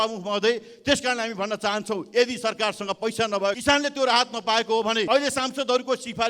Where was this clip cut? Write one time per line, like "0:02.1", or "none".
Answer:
0:03.6
0:05.1

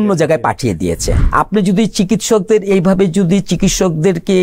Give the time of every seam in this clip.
0:01.2

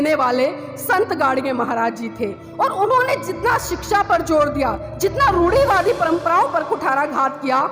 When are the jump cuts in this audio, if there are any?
0:04.9

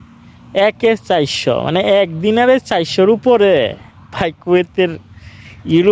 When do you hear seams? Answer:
none

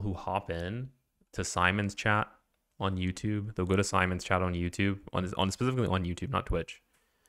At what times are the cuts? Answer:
none

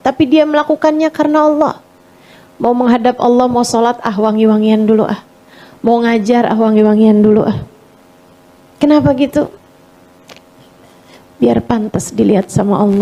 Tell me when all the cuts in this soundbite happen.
none

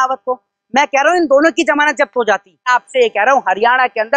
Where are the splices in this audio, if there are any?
0:02.7

